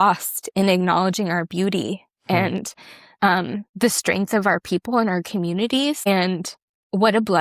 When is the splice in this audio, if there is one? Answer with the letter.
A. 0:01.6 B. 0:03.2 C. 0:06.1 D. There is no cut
C